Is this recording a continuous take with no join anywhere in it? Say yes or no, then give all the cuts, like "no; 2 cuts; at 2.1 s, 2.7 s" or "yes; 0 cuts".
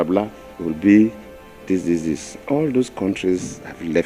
yes; 0 cuts